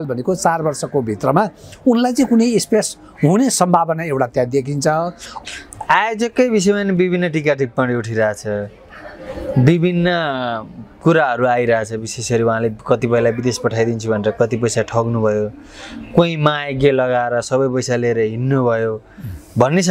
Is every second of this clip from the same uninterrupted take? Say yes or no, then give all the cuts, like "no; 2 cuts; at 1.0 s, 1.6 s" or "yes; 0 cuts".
no; 1 cut; at 5.2 s